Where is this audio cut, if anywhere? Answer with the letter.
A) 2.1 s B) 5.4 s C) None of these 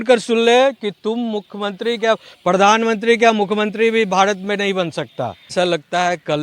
B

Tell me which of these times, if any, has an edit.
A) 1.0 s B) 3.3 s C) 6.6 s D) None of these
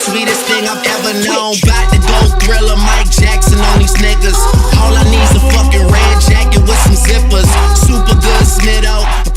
A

